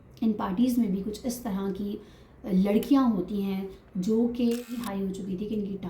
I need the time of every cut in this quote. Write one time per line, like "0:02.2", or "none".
0:04.8